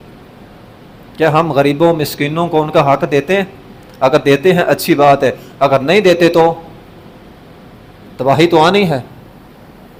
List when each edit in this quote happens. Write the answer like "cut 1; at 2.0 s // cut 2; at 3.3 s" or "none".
none

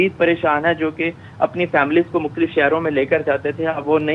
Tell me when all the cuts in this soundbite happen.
none

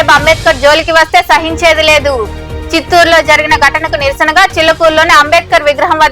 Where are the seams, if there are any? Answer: none

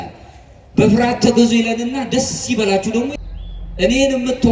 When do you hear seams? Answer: cut 1; at 3.1 s

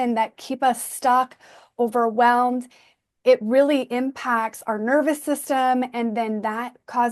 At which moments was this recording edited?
none

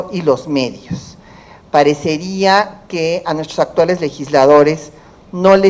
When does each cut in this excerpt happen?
cut 1; at 4.2 s

